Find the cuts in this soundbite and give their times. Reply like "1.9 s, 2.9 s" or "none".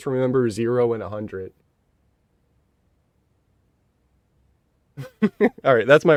none